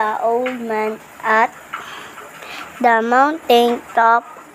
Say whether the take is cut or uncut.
uncut